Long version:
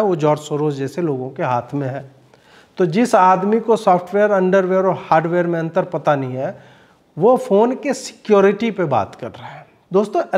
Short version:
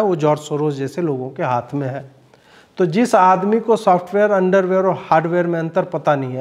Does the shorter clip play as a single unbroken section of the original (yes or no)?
yes